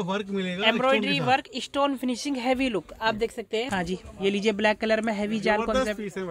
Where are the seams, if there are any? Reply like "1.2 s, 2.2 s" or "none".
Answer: 3.7 s